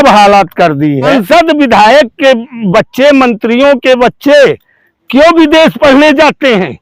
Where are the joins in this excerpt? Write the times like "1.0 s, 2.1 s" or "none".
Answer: 1.1 s